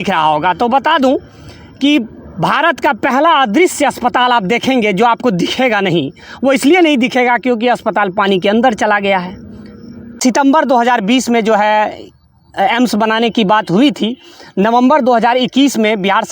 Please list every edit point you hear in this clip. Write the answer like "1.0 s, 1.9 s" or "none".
10.2 s